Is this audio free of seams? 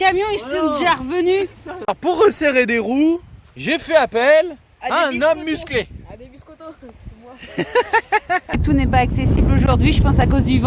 no; 2 cuts; at 1.7 s, 8.6 s

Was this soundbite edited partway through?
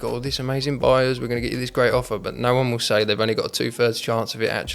no; 0 cuts

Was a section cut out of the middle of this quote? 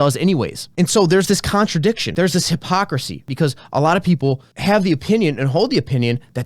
yes; 3 cuts; at 2.1 s, 3.2 s, 4.5 s

